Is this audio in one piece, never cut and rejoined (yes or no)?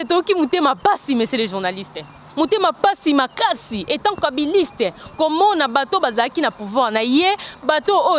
yes